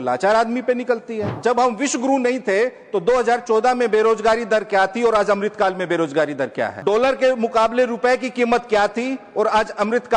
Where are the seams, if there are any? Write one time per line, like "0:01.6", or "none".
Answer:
0:01.3
0:06.7

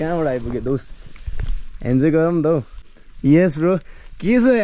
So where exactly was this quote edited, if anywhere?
0:02.8

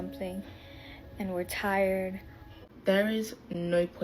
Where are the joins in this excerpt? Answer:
0:02.6

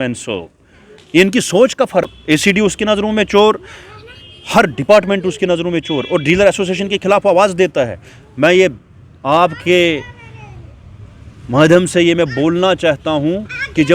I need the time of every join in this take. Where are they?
0:02.1

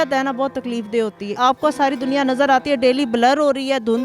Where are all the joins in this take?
0:01.3

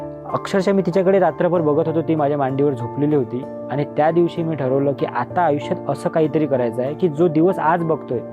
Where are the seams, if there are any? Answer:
none

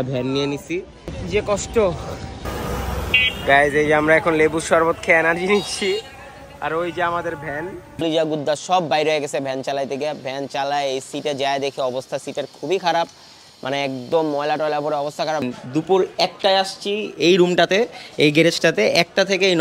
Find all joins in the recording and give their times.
0:01.2
0:07.9
0:15.4

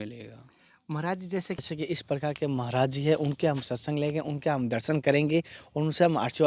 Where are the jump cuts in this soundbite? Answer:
0:01.7

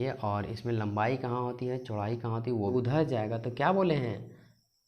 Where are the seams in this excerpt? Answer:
0:02.7

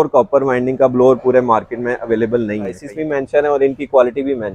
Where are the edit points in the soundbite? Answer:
0:02.8

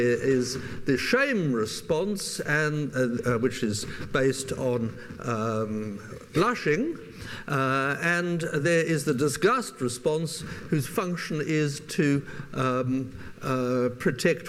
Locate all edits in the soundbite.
0:03.4

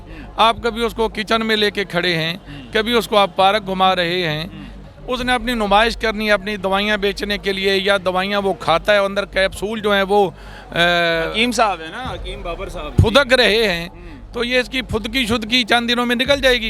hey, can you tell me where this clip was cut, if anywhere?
0:04.7

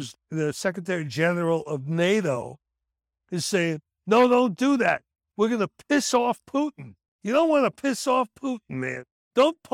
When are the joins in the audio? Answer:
0:05.2

